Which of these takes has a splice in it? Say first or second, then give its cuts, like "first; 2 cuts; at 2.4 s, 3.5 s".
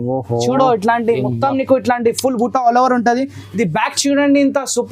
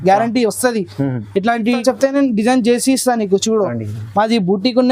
second; 1 cut; at 1.8 s